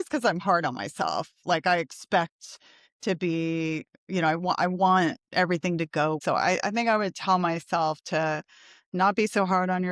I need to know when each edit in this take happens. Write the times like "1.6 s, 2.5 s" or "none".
6.2 s